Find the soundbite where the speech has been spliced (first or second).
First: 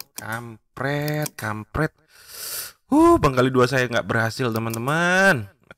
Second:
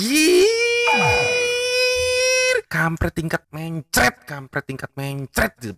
second